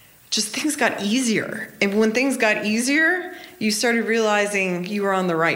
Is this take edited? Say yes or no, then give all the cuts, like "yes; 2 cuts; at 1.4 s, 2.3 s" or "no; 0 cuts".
no; 0 cuts